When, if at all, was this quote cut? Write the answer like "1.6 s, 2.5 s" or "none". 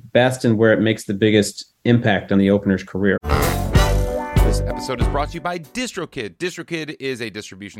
3.2 s

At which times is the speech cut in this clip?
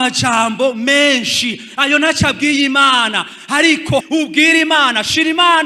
4.0 s

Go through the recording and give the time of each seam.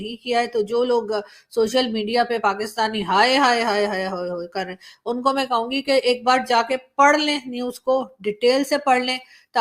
none

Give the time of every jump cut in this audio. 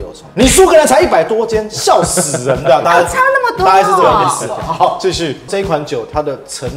5.4 s

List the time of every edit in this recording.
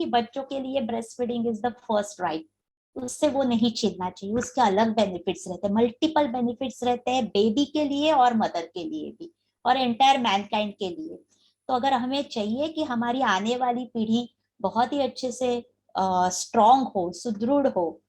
none

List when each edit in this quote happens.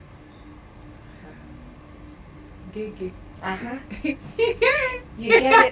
none

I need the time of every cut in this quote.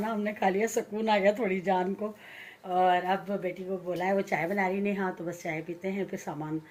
none

